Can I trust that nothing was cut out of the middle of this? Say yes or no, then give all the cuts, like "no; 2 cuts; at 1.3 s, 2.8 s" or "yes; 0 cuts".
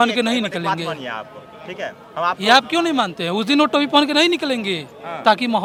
yes; 0 cuts